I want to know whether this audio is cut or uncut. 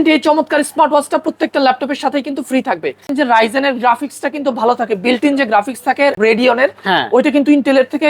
cut